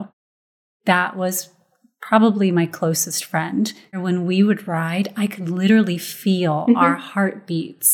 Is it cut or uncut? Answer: cut